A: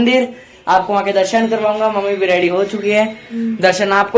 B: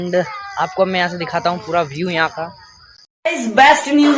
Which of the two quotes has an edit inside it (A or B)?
B